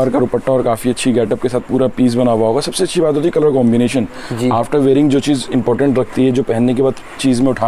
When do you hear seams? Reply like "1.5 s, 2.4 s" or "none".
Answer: none